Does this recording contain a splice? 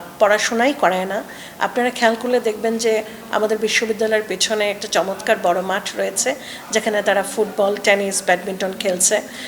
no; 0 cuts

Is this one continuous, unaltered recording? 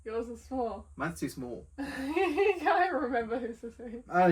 yes; 0 cuts

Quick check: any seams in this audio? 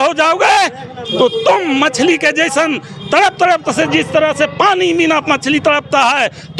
no; 0 cuts

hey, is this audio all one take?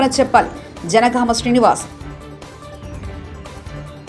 yes; 0 cuts

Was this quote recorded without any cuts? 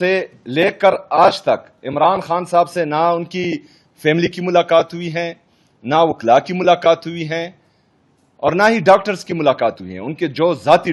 yes; 0 cuts

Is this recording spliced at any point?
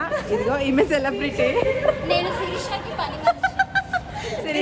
no; 0 cuts

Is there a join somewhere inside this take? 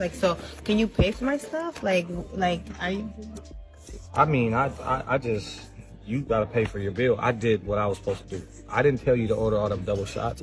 no; 0 cuts

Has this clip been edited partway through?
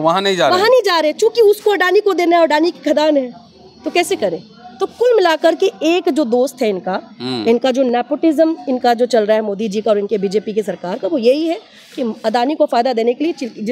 no; 0 cuts

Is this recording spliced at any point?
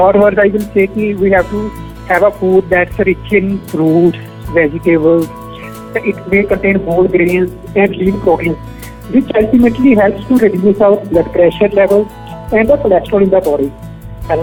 no; 0 cuts

